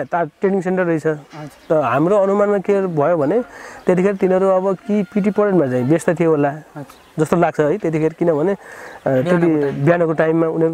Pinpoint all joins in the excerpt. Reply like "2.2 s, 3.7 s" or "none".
none